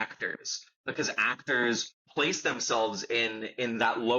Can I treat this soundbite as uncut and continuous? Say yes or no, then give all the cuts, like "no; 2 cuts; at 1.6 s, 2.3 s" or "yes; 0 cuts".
no; 1 cut; at 2.0 s